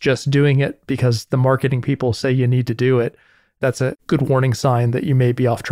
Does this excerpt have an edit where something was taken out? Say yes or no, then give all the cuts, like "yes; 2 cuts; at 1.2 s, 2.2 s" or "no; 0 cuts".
no; 0 cuts